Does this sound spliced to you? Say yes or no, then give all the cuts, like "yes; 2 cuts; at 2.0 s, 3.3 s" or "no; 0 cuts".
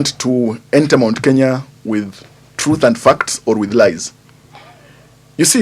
no; 0 cuts